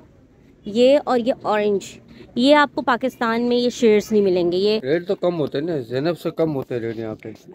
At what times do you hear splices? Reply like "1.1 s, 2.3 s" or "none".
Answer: 4.8 s